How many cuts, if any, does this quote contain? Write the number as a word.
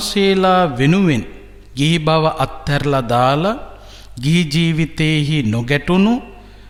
zero